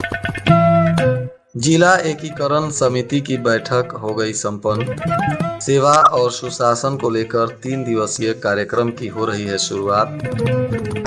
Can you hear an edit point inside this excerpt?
yes; 1 cut; at 1.3 s

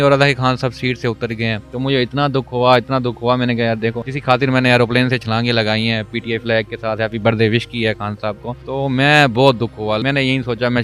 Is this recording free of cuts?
no; 4 cuts; at 1.6 s, 4.1 s, 8.5 s, 10.0 s

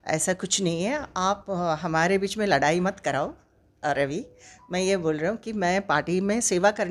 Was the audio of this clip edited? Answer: no; 0 cuts

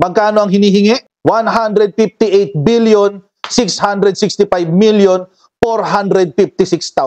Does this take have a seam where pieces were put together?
no; 0 cuts

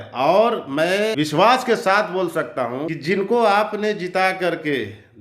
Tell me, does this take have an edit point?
yes; 2 cuts; at 1.1 s, 2.9 s

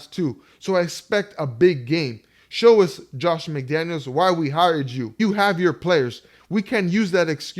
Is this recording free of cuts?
no; 1 cut; at 5.0 s

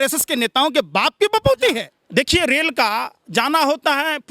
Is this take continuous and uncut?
no; 1 cut; at 1.9 s

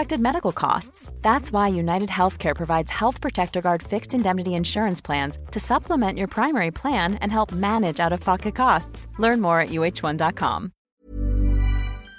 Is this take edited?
yes; 1 cut; at 10.9 s

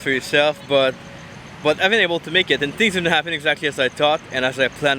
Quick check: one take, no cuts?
yes; 0 cuts

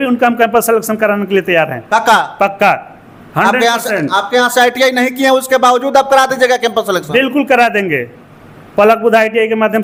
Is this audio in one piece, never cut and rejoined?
yes; 0 cuts

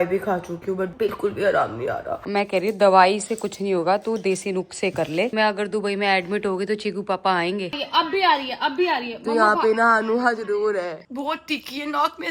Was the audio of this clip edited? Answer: yes; 5 cuts; at 0.9 s, 2.2 s, 5.3 s, 7.7 s, 11.0 s

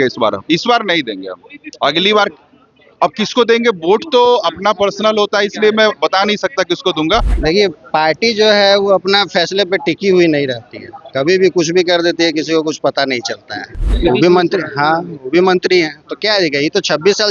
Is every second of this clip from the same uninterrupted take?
no; 2 cuts; at 7.3 s, 13.8 s

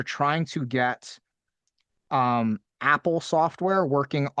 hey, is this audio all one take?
yes; 0 cuts

